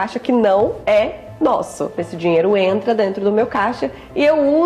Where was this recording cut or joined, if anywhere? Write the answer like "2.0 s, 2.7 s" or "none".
2.1 s